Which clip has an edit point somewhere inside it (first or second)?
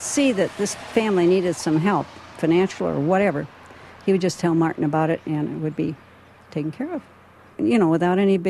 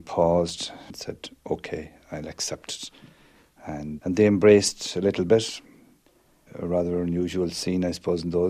second